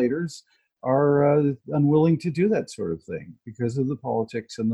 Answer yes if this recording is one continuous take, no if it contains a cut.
yes